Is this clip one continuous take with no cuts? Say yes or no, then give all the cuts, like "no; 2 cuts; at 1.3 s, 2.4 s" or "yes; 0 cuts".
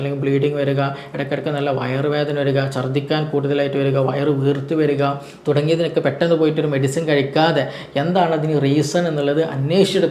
yes; 0 cuts